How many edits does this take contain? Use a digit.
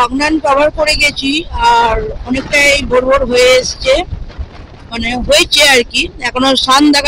0